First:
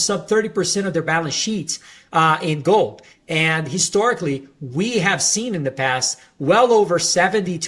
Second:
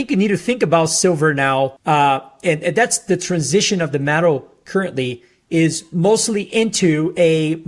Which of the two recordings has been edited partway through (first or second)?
second